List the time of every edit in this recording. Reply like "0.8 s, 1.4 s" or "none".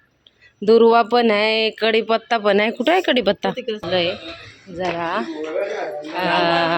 3.8 s